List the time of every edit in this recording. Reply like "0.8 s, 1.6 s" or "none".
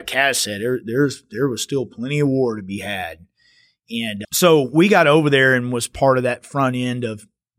4.2 s